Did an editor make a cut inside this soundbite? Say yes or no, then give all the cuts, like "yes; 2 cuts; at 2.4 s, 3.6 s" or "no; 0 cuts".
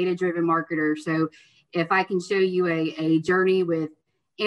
no; 0 cuts